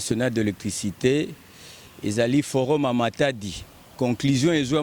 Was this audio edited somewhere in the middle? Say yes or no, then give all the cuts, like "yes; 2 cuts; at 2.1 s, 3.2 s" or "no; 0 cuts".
no; 0 cuts